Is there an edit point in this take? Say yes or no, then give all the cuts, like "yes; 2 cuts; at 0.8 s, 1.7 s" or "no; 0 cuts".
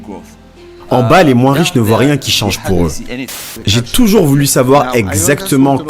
yes; 2 cuts; at 0.9 s, 3.0 s